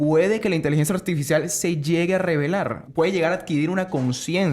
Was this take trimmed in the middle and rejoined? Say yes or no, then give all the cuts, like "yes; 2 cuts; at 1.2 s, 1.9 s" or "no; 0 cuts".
yes; 1 cut; at 2.8 s